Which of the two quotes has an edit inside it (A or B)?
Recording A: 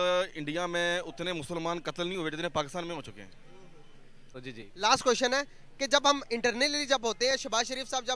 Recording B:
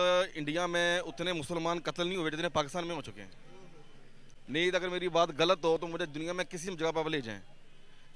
A